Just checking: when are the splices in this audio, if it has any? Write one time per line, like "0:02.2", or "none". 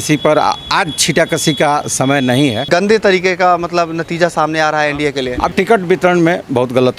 0:02.6
0:05.5

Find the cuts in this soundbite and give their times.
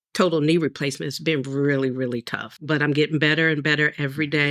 0:02.5

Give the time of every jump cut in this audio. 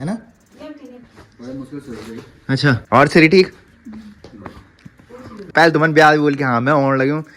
none

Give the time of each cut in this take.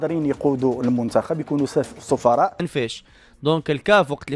0:02.6

